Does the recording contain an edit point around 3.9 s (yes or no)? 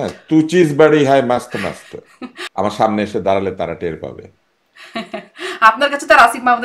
no